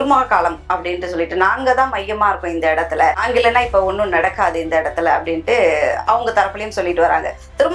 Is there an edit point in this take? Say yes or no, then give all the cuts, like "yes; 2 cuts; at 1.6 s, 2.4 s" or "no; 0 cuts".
no; 0 cuts